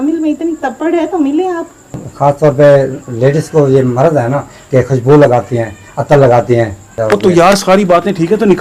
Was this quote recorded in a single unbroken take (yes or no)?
no